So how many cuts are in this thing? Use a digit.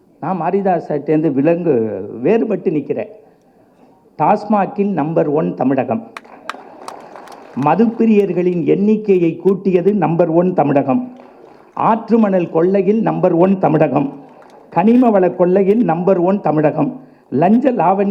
0